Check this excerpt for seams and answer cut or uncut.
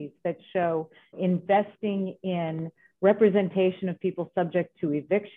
cut